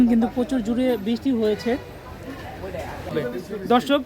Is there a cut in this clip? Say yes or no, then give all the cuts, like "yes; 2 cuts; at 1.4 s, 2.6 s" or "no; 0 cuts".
yes; 1 cut; at 3.1 s